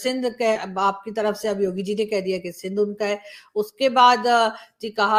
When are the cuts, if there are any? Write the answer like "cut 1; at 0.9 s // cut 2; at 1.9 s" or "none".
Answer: none